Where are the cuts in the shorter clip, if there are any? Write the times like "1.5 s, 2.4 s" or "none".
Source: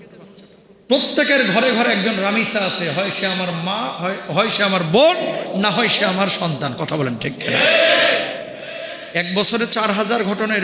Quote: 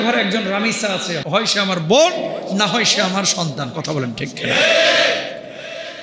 1.2 s

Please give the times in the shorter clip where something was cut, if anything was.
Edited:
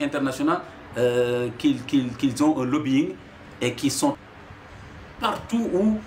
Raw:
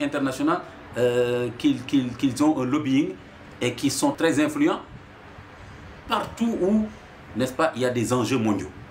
4.2 s

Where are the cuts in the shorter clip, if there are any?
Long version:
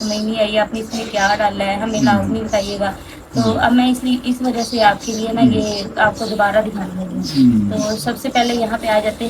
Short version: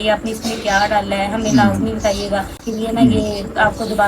2.7 s

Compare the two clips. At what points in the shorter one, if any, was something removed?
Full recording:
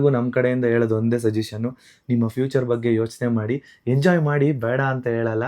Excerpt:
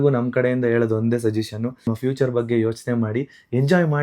1.9 s

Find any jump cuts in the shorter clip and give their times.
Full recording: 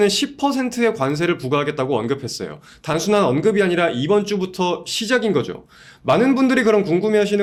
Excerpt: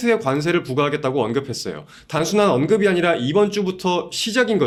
none

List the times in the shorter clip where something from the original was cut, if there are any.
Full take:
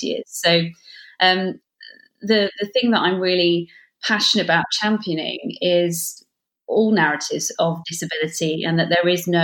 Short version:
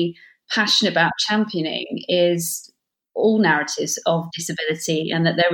none

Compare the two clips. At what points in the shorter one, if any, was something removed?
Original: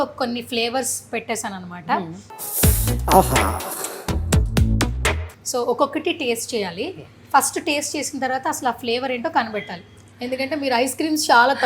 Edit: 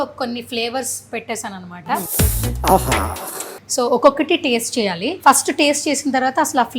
2.1 s, 3.6 s, 5.1 s

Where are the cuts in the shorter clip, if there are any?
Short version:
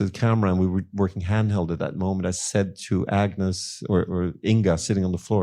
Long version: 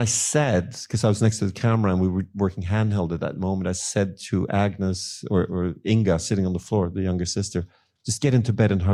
none

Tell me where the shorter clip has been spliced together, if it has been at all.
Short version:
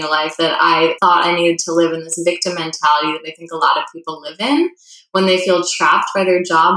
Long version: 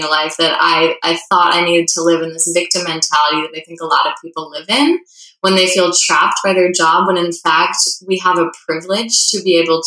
1.0 s

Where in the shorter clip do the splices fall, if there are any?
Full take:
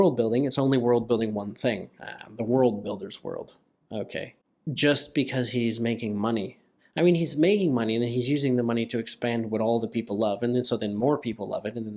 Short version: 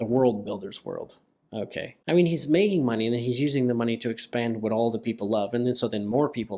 1.9 s

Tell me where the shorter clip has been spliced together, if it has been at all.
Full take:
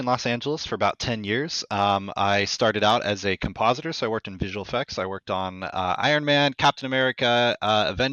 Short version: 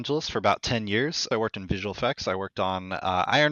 1.2 s

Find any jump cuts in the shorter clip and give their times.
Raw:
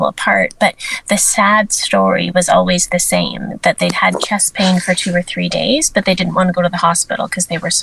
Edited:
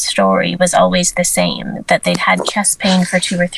none

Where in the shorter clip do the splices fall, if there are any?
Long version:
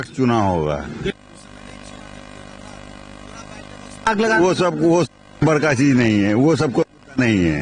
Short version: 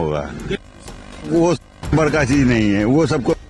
1.3 s

